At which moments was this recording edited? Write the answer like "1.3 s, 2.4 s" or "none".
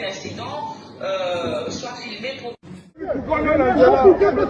3.2 s